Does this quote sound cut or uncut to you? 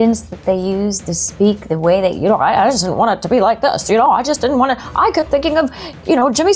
uncut